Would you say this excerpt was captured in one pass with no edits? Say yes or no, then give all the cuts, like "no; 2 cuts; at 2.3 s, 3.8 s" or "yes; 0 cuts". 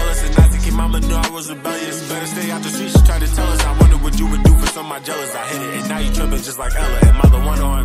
yes; 0 cuts